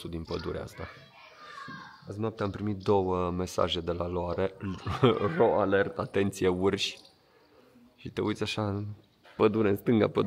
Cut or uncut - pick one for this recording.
uncut